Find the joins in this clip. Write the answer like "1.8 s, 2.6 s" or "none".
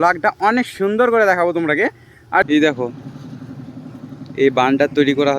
2.5 s